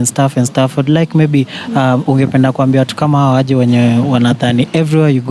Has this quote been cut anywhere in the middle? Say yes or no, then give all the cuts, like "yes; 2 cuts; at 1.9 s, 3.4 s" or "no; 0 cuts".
no; 0 cuts